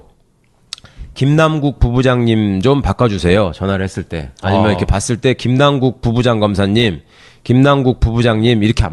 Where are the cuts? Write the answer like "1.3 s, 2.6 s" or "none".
1.7 s